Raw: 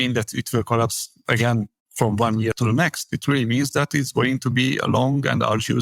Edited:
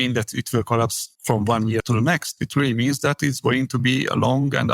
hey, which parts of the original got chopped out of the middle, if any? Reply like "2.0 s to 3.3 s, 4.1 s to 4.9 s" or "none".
1.1 s to 1.8 s